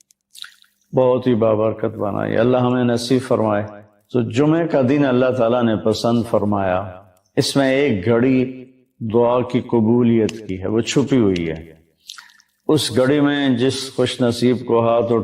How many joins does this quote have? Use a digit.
0